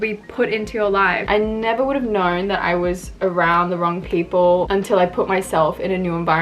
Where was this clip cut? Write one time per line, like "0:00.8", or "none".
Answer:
0:01.2
0:04.7